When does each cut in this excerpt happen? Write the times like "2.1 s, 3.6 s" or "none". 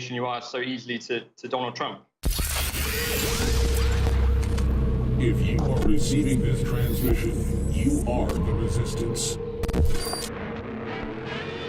2.5 s